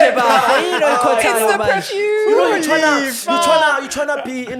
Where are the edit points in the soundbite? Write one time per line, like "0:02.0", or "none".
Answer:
none